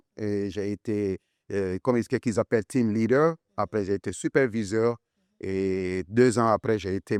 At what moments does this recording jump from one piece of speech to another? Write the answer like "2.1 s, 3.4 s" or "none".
none